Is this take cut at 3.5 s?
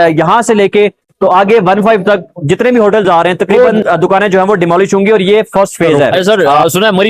yes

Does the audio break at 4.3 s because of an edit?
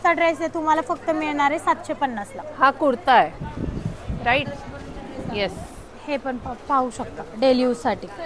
no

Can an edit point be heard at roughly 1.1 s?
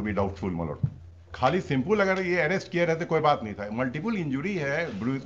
yes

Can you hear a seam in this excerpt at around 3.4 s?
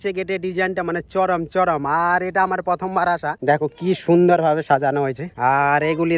yes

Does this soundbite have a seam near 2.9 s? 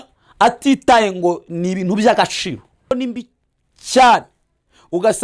yes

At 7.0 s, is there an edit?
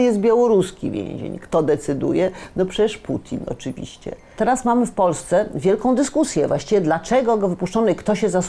no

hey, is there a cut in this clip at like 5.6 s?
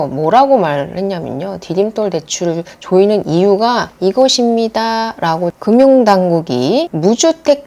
yes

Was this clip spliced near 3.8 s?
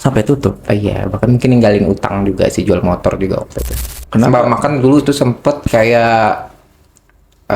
yes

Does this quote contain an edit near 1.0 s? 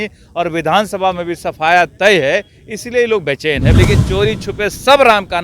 no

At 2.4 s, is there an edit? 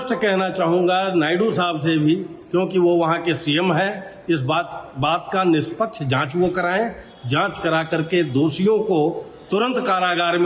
no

